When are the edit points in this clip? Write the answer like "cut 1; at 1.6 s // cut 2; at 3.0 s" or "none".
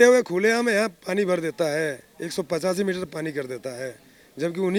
none